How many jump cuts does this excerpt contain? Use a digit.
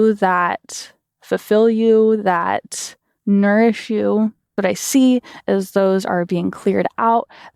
1